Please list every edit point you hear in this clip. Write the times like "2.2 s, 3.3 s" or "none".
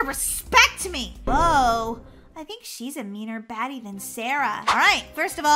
1.3 s, 4.6 s